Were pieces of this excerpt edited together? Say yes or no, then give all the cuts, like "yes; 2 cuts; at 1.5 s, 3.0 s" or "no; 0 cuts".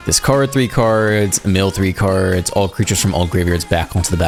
no; 0 cuts